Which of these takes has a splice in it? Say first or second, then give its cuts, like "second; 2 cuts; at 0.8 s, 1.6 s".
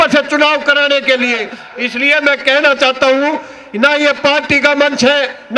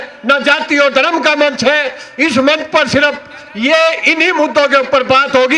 first; 1 cut; at 1.5 s